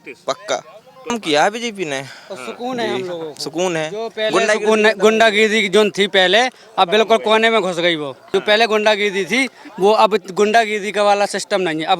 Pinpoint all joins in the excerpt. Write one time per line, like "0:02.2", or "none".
0:01.2
0:08.2